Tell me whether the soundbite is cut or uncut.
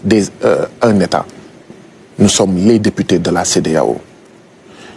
uncut